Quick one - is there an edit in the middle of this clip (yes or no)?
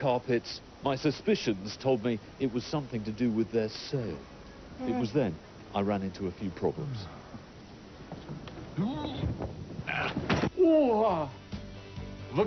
yes